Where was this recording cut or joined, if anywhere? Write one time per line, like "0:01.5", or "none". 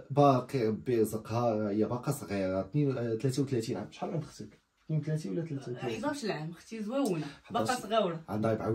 none

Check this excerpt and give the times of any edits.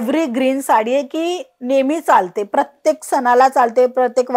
none

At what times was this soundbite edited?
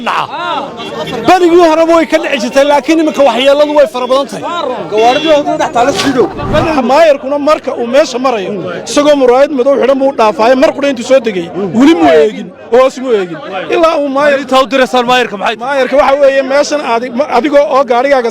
0:06.5

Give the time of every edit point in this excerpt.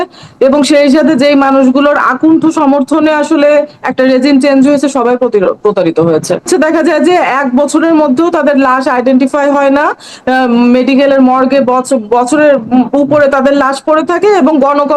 0:06.5

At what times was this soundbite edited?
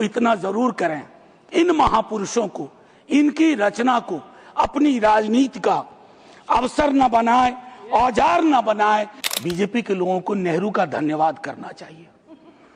0:09.2

